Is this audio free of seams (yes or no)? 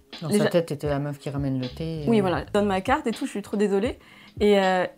no